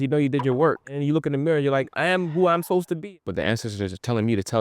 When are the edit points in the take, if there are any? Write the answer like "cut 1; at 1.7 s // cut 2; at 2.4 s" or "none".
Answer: cut 1; at 0.9 s // cut 2; at 1.9 s // cut 3; at 3.0 s